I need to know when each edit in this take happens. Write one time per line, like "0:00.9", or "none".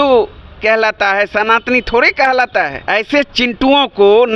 0:02.8